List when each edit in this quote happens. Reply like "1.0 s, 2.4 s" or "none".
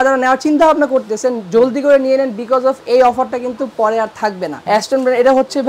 4.6 s